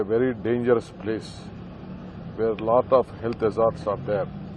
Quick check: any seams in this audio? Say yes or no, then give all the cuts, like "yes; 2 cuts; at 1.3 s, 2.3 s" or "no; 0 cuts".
no; 0 cuts